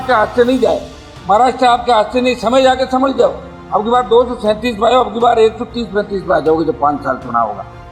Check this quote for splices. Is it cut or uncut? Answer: uncut